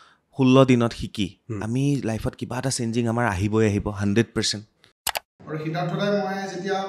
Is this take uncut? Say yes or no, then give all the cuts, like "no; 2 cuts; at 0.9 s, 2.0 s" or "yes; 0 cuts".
no; 1 cut; at 5.3 s